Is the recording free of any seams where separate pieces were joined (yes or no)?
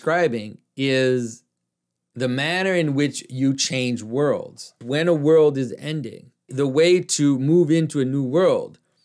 no